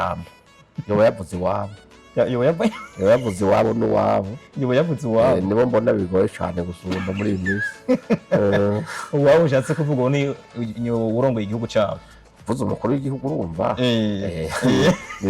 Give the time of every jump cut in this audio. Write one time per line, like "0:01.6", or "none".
none